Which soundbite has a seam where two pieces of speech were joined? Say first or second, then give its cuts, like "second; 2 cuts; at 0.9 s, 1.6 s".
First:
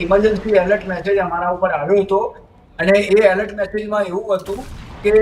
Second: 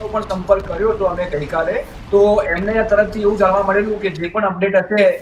second; 1 cut; at 1.9 s